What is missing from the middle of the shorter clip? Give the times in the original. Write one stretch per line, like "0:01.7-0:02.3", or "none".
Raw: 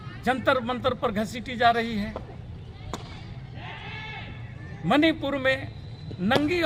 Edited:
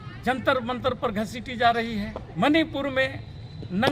0:02.2-0:04.7